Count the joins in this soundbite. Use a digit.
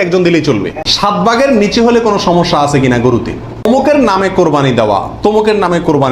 2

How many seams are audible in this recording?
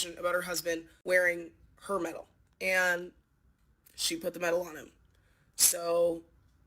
1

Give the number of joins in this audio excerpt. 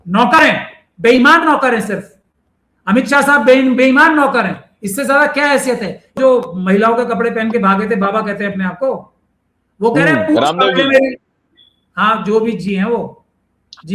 1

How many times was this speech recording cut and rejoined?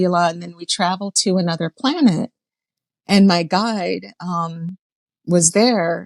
0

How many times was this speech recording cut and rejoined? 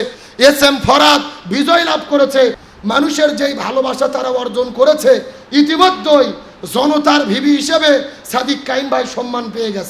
1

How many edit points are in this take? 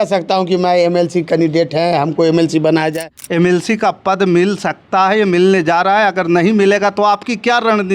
1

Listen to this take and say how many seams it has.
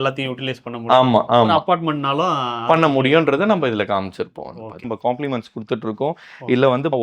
1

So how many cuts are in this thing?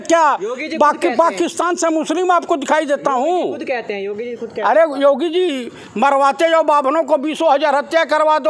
0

